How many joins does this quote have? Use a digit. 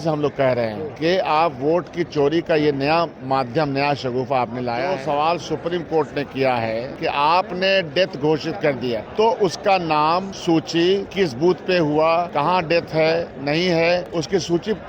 8